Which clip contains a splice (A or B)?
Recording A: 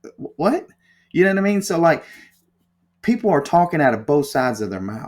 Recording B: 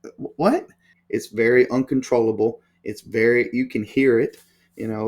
B